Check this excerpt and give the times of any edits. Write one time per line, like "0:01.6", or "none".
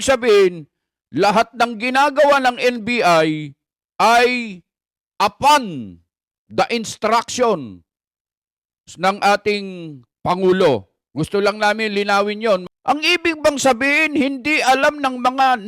0:12.6